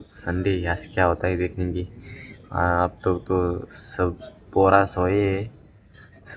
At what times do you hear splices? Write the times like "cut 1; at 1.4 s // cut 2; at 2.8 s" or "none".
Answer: none